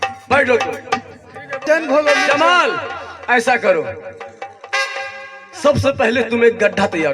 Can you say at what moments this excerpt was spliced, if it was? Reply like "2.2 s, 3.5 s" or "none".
1.6 s